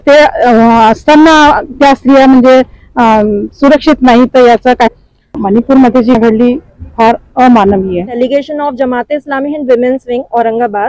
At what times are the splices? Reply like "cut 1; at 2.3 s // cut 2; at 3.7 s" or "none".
cut 1; at 4.9 s // cut 2; at 8.1 s